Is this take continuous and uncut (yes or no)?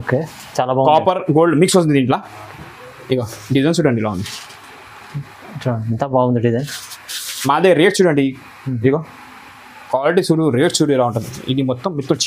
yes